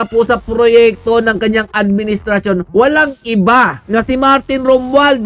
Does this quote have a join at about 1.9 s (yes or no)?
no